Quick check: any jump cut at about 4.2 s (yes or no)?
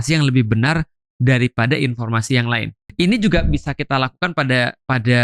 no